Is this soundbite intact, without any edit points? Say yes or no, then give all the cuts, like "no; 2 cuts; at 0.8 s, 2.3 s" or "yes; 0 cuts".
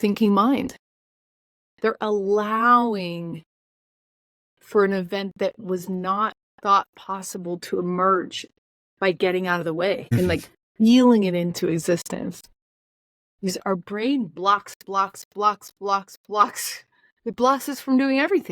no; 1 cut; at 10.1 s